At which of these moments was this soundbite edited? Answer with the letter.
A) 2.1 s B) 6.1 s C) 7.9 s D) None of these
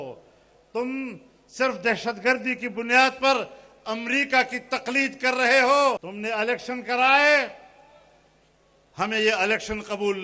B